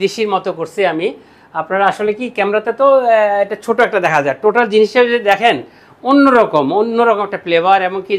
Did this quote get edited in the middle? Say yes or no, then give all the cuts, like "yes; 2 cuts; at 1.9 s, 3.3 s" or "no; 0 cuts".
no; 0 cuts